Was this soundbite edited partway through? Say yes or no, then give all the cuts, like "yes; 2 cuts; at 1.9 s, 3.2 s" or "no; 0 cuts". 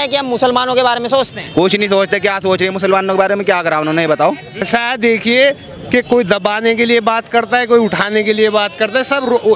yes; 1 cut; at 4.6 s